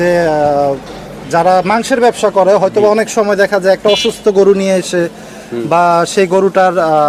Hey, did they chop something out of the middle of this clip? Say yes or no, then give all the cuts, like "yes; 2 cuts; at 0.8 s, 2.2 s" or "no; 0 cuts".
no; 0 cuts